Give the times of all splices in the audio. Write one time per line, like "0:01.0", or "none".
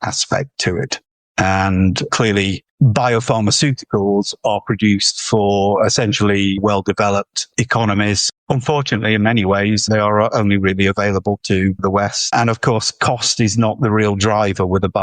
0:02.6

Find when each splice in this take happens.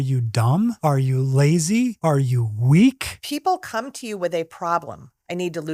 0:00.8
0:02.0
0:03.1

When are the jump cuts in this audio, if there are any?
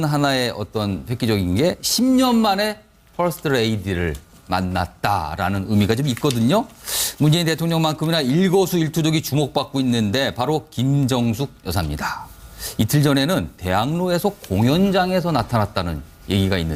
none

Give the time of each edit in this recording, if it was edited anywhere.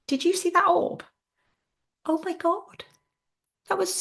none

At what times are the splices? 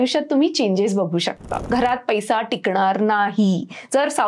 0:01.6

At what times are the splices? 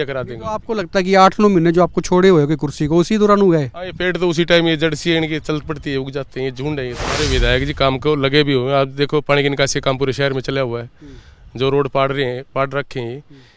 0:07.3

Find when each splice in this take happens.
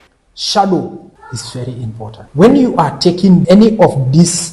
0:01.2
0:02.2
0:03.4

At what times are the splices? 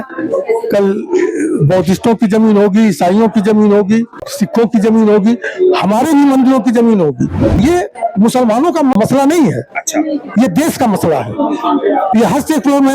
0:07.6
0:09.0

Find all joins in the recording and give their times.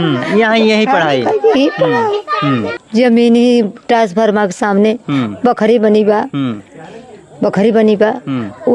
0:02.8

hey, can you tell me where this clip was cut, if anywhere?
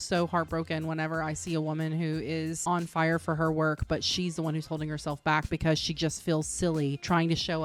0:02.6

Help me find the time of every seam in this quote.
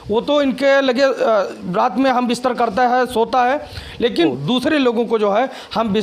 none

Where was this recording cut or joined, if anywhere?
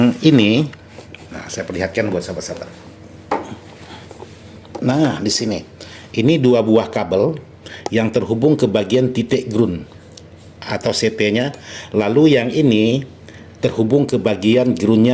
none

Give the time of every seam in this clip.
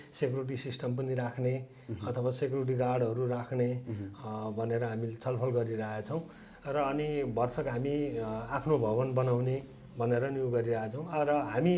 none

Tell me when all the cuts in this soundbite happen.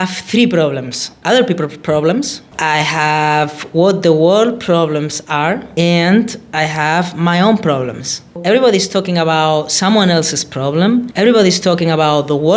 0:01.2

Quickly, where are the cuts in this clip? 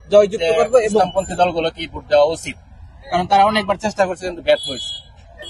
0:01.0

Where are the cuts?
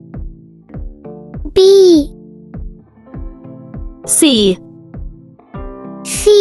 0:01.5

